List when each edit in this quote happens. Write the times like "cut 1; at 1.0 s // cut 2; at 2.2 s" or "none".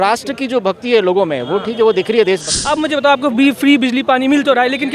cut 1; at 2.5 s